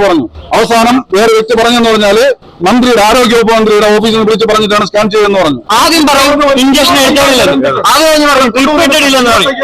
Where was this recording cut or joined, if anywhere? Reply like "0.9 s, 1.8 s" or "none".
5.6 s